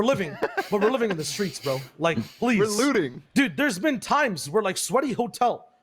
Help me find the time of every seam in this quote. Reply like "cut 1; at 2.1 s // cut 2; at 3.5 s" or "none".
cut 1; at 3.2 s

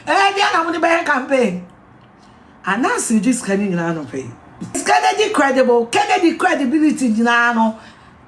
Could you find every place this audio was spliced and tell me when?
cut 1; at 4.8 s

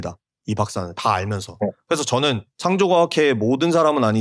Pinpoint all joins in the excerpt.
cut 1; at 2.5 s

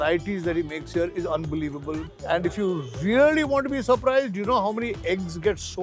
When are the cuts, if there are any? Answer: cut 1; at 2.1 s

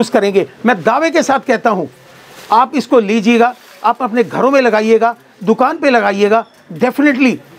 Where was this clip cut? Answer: none

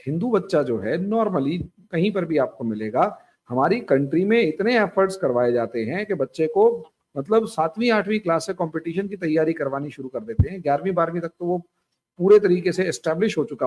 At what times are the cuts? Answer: none

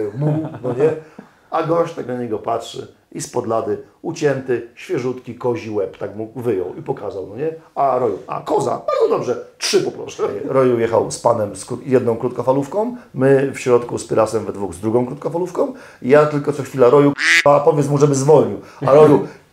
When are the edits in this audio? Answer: cut 1; at 10.4 s

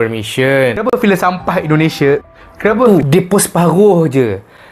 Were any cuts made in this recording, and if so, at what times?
cut 1; at 2.9 s

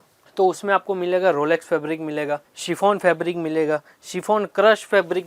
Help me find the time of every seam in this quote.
cut 1; at 2.5 s

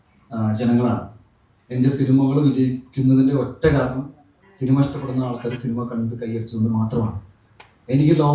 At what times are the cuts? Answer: none

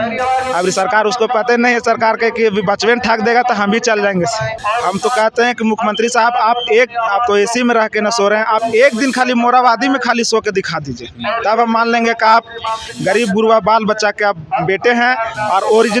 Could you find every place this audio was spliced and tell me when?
cut 1; at 4.6 s

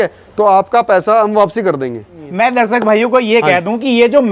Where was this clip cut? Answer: cut 1; at 2.2 s

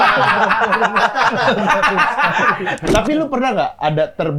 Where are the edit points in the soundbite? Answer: cut 1; at 2.8 s

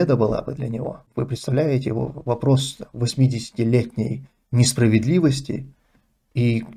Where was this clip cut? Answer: cut 1; at 1.0 s

